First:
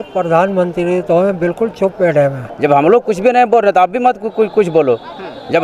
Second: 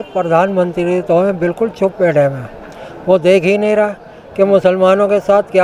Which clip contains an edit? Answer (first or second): first